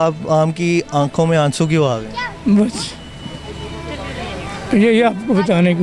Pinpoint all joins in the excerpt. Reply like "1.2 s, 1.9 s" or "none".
none